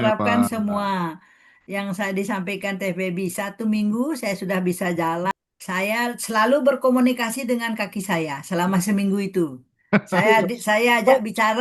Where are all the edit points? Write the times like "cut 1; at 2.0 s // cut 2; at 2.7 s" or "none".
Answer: cut 1; at 5.3 s